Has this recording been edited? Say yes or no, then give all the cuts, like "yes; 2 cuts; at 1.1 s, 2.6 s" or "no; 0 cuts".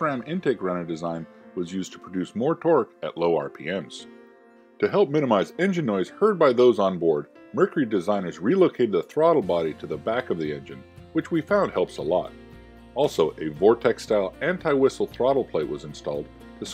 no; 0 cuts